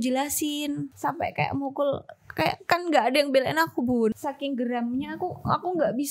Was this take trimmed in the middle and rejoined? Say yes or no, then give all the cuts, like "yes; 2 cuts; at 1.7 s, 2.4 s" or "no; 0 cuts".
yes; 2 cuts; at 0.9 s, 4.2 s